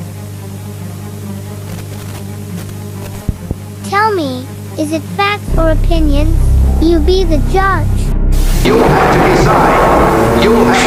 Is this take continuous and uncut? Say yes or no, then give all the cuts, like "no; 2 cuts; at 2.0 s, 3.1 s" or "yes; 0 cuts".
yes; 0 cuts